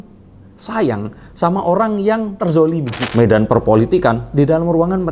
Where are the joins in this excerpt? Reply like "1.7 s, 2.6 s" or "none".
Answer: 3.0 s